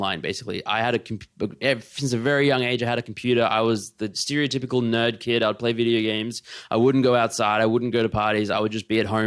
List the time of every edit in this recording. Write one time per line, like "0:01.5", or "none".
0:04.2